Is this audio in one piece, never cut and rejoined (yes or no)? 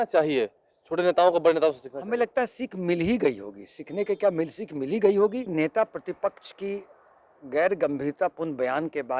no